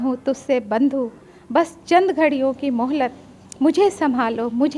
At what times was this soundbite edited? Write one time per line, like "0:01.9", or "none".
none